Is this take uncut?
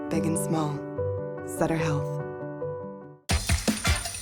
yes; 0 cuts

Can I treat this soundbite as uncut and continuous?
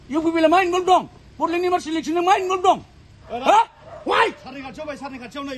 yes; 0 cuts

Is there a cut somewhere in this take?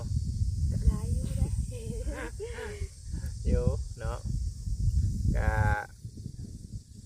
no; 0 cuts

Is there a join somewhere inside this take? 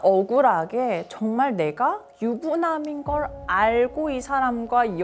no; 0 cuts

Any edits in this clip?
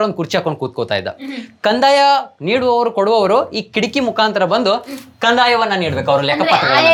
no; 0 cuts

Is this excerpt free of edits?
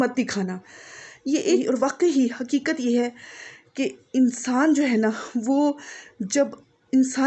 no; 1 cut; at 1.6 s

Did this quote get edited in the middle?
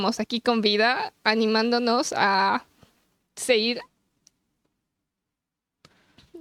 no; 0 cuts

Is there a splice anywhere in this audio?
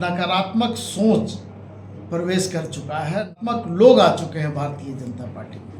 yes; 1 cut; at 3.3 s

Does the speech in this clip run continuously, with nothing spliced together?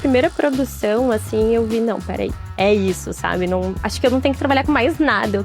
yes; 0 cuts

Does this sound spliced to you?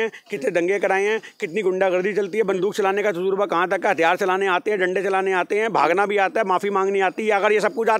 no; 0 cuts

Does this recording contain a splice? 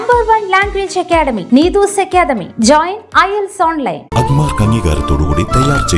no; 0 cuts

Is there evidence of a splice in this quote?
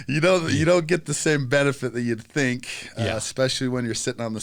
no; 0 cuts

